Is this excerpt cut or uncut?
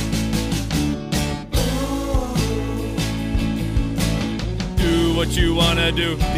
uncut